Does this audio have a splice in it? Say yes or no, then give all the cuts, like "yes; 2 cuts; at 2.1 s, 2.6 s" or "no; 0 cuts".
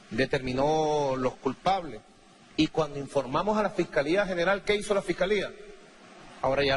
yes; 1 cut; at 3.7 s